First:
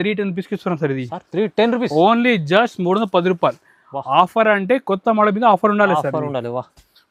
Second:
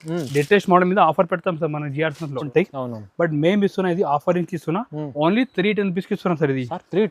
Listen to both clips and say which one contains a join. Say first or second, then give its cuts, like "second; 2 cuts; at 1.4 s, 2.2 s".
second; 1 cut; at 2.5 s